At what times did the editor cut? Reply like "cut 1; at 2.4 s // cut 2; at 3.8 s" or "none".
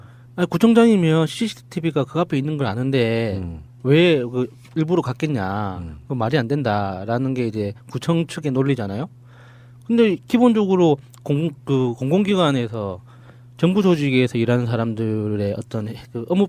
none